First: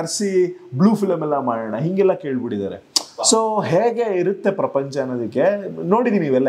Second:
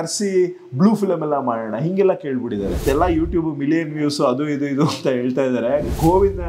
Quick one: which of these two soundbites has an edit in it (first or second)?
second